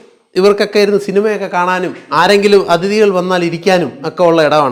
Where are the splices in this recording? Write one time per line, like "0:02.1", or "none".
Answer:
none